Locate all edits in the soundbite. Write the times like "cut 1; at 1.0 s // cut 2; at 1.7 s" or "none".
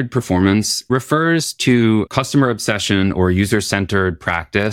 cut 1; at 0.9 s // cut 2; at 2.1 s